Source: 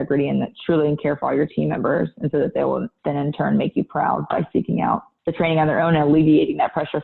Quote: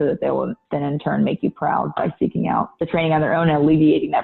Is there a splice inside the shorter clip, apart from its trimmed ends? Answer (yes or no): yes